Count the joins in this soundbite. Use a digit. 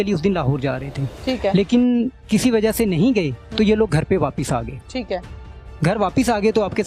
1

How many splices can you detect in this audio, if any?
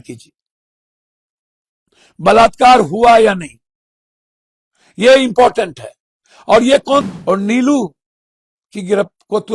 1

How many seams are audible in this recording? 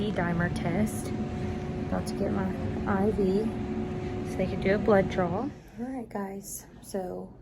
1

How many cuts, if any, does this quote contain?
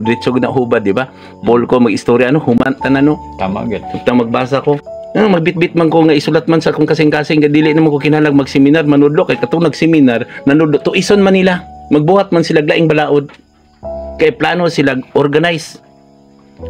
2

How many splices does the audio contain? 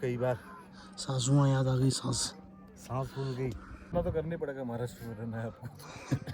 1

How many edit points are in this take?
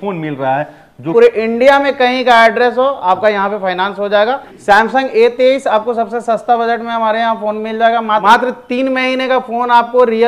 3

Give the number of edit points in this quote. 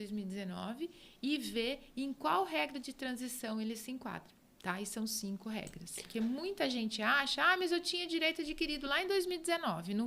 1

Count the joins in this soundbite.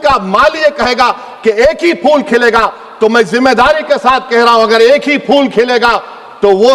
0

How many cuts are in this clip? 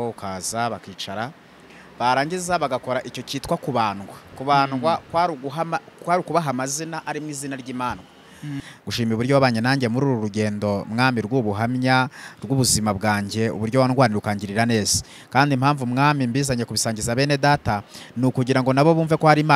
1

